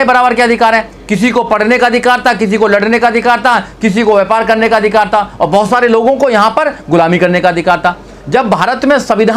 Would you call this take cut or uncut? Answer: uncut